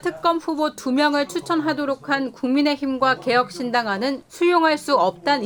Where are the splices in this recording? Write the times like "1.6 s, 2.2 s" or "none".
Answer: none